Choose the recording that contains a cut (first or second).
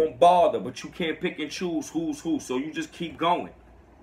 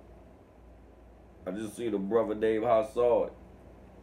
second